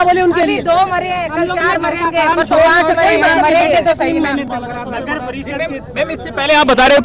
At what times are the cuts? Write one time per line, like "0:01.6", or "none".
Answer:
none